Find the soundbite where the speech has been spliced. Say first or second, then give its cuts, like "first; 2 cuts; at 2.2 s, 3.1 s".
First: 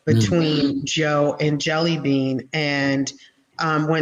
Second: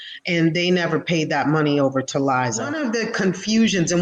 second; 1 cut; at 2.8 s